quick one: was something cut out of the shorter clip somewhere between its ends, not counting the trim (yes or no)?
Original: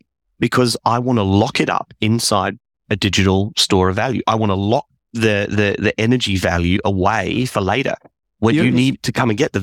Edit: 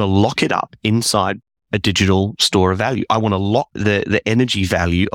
yes